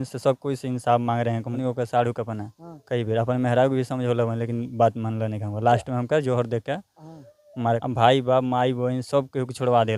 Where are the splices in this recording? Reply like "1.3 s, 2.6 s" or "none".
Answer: 1.6 s, 7.8 s